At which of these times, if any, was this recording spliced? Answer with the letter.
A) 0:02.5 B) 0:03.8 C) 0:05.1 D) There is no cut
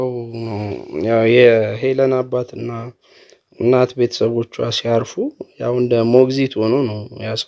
D